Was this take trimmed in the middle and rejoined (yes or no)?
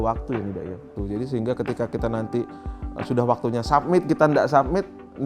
yes